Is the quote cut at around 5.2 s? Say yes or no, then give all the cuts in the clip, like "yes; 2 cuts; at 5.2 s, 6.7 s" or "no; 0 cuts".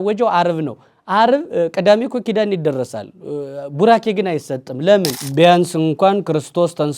yes; 1 cut; at 5.2 s